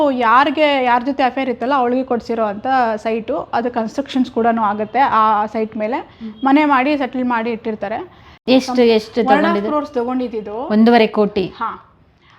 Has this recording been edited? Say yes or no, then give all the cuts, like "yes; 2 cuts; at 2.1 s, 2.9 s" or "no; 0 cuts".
yes; 1 cut; at 8.3 s